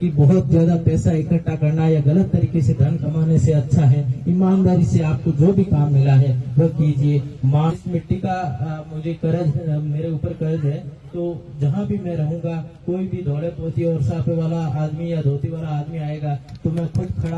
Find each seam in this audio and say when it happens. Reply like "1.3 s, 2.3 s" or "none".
7.7 s

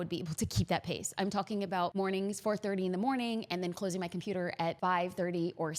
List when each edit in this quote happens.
1.9 s, 4.8 s

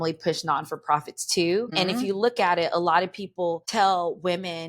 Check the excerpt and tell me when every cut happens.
1.7 s, 3.6 s

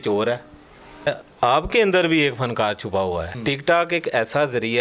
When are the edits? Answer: 1.1 s, 3.3 s

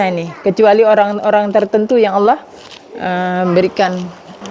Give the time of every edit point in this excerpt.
none

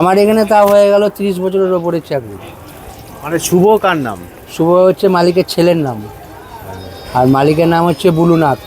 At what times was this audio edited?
none

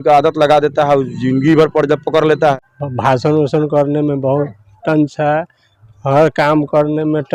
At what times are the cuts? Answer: 2.7 s

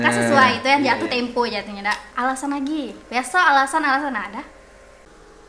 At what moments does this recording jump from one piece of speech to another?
2.1 s, 3.0 s

